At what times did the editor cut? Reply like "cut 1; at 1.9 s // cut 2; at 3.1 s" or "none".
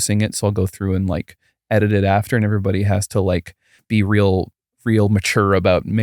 cut 1; at 3.7 s

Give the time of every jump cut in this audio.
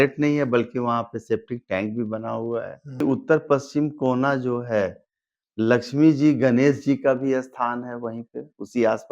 cut 1; at 3.0 s

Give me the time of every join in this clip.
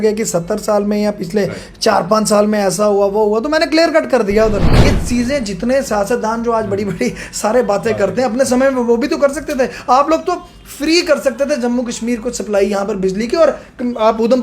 cut 1; at 4.8 s

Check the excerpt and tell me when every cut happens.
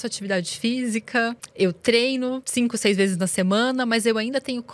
cut 1; at 1.4 s // cut 2; at 2.4 s

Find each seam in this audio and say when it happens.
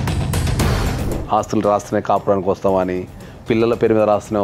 cut 1; at 1.0 s

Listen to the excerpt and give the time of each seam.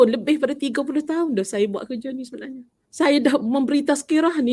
cut 1; at 2.8 s

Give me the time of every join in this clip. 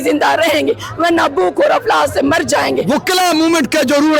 cut 1; at 2.8 s

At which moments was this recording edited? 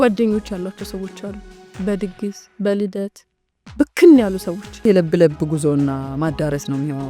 cut 1; at 4.8 s

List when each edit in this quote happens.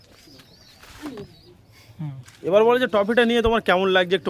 none

